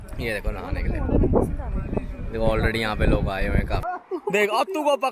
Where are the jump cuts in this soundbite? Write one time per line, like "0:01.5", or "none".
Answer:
0:03.8